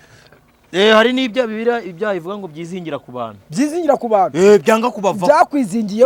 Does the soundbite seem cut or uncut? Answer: uncut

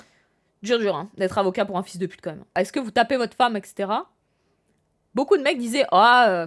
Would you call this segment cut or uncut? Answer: cut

